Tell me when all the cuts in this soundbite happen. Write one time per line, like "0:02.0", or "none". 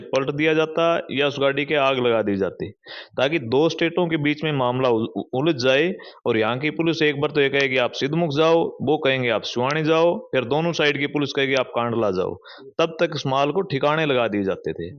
none